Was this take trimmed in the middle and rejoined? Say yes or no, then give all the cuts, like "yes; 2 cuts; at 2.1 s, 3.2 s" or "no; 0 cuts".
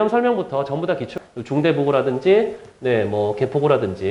yes; 1 cut; at 1.2 s